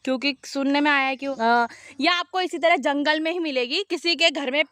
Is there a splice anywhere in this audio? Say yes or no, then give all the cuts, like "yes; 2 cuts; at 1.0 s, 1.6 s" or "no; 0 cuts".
yes; 1 cut; at 1.3 s